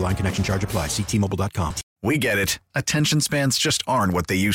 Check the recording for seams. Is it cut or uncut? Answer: cut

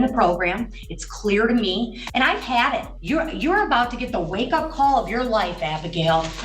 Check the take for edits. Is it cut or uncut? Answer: cut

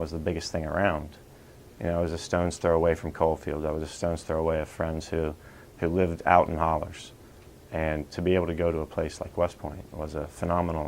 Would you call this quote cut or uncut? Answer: cut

